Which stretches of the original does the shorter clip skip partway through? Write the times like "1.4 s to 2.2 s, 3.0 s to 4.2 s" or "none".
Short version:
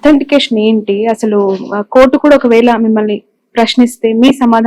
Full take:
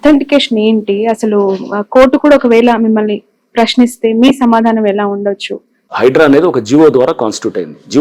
none